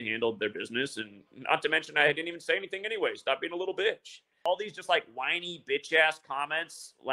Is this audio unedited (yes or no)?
no